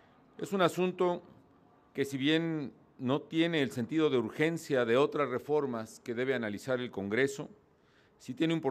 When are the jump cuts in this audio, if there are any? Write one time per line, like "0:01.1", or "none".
0:02.6